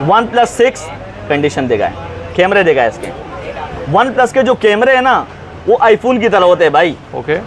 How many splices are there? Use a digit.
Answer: 0